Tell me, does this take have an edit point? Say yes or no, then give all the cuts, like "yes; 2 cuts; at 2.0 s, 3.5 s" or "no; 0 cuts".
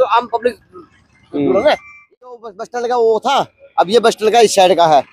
yes; 1 cut; at 2.3 s